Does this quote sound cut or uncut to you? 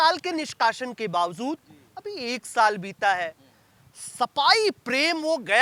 uncut